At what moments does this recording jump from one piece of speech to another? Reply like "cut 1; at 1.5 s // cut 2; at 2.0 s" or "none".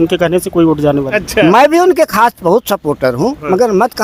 cut 1; at 1.1 s